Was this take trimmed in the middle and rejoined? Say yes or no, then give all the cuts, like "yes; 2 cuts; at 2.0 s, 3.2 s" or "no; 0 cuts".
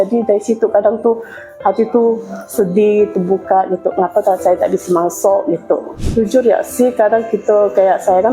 yes; 1 cut; at 6.0 s